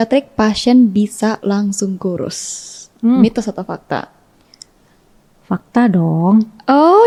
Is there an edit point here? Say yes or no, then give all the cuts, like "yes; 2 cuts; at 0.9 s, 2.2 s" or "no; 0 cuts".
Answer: no; 0 cuts